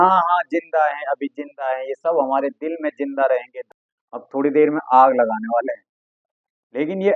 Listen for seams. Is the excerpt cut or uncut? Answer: cut